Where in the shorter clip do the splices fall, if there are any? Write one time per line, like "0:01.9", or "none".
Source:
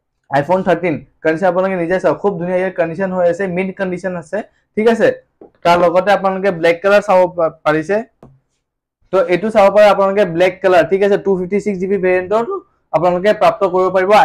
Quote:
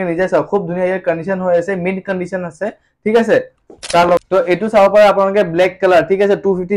0:04.2